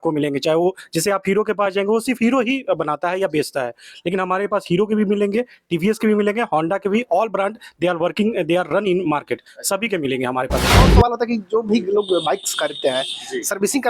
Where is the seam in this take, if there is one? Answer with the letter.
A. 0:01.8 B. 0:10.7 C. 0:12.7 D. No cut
B